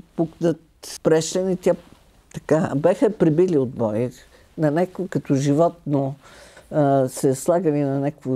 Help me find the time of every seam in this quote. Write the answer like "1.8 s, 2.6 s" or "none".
0.9 s